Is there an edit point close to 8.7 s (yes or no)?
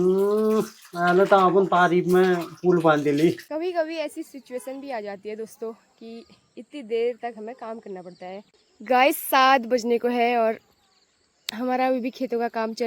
yes